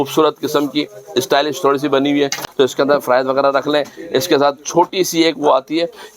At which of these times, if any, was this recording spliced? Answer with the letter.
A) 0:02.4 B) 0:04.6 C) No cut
A